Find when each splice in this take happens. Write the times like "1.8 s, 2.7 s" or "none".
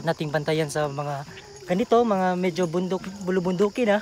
none